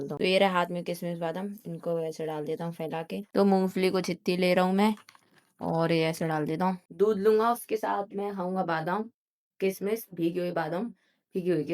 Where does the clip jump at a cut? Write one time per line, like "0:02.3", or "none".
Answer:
0:03.3
0:06.9